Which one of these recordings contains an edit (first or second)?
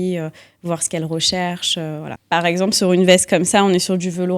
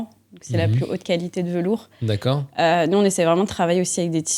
first